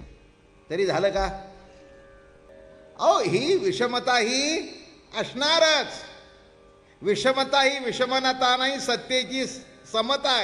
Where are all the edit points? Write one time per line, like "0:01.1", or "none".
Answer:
0:02.5